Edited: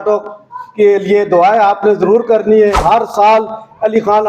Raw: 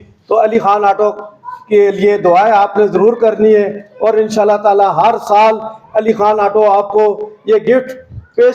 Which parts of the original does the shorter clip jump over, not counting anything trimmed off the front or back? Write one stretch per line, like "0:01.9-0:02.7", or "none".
0:03.7-0:04.9